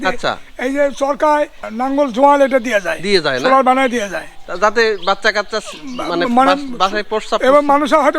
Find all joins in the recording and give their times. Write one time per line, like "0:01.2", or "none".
0:01.7